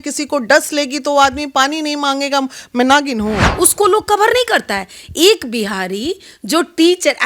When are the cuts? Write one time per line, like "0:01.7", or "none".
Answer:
0:03.5

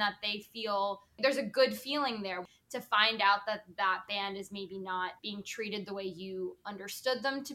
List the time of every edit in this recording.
0:01.2
0:02.4
0:05.2

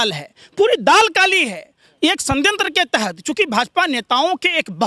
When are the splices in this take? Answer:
none

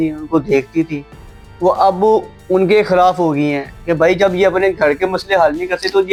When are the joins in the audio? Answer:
none

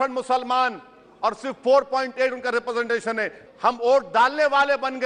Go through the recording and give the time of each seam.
0:03.4

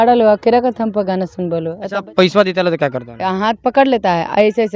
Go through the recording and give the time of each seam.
0:01.8

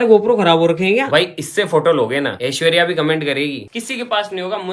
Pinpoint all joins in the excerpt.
0:01.1
0:02.4
0:03.7

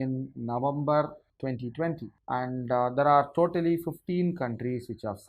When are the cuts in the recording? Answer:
0:01.2
0:02.1

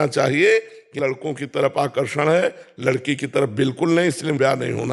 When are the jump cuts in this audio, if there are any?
none

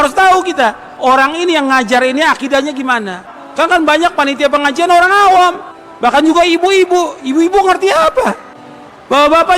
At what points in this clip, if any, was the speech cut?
0:03.2

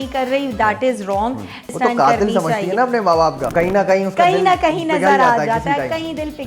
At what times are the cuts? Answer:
0:01.7
0:03.5

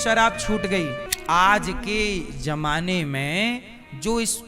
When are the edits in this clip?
0:01.1

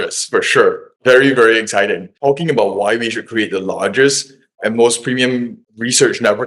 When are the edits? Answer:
0:02.1

